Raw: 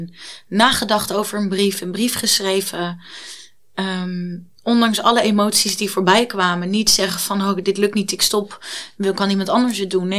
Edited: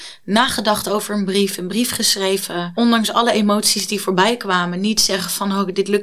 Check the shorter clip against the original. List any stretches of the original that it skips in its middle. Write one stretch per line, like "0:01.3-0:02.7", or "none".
0:02.9-0:04.6

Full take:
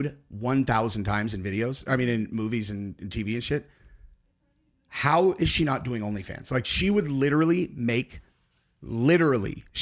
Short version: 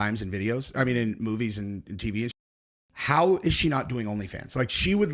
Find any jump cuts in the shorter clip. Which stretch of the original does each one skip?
0:03.4-0:04.3

